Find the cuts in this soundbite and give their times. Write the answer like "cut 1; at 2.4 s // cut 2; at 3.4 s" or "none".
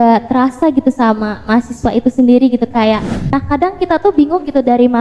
cut 1; at 3.1 s